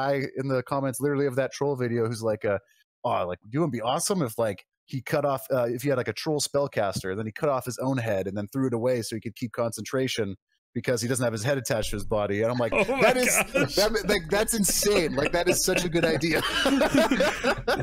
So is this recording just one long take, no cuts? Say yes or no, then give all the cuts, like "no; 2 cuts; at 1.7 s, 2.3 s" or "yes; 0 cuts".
yes; 0 cuts